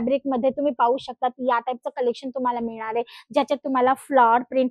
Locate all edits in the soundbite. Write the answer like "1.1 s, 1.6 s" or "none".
none